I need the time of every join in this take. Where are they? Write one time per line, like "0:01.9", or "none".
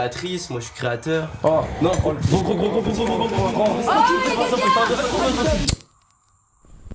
0:05.7